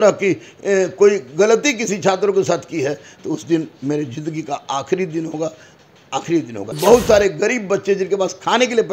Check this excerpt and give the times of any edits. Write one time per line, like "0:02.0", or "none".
0:06.8